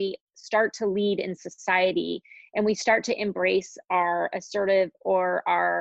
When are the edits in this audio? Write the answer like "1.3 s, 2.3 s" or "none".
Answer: none